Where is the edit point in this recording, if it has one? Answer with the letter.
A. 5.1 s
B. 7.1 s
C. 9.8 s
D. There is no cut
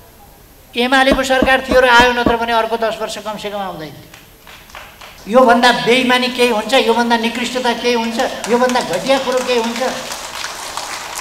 A